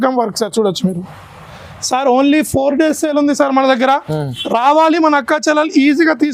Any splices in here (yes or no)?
no